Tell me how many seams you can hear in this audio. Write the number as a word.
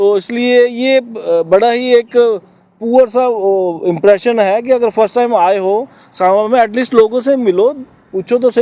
zero